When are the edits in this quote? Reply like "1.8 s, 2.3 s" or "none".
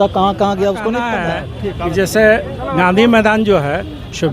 1.1 s